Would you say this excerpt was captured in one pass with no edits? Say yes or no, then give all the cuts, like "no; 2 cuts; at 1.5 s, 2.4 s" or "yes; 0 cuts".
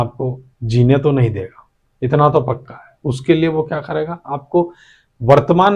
yes; 0 cuts